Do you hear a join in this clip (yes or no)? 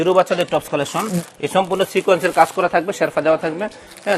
no